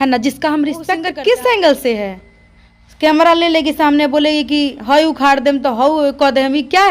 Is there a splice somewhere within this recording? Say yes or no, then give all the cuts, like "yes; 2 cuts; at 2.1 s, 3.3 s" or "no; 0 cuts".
yes; 1 cut; at 1.0 s